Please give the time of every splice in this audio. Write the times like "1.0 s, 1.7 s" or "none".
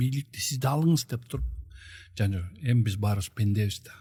none